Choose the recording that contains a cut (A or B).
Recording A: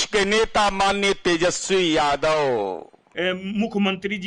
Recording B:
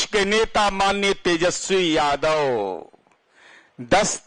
A